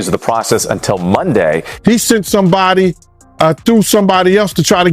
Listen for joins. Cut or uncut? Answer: cut